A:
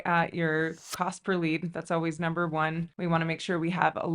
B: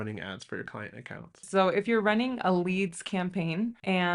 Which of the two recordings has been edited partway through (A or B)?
B